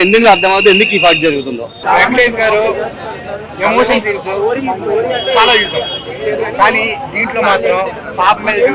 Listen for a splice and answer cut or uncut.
cut